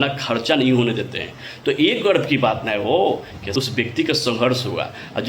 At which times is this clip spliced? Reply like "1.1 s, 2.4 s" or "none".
3.3 s